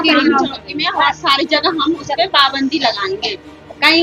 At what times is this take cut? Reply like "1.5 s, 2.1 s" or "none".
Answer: none